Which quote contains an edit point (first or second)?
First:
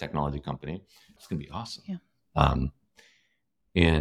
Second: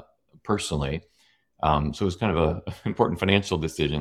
first